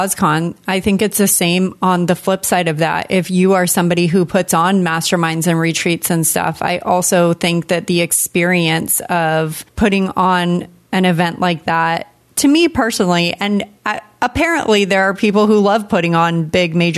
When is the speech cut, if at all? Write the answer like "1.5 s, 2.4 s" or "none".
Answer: none